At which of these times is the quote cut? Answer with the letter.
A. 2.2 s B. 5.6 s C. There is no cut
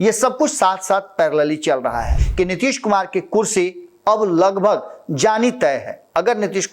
A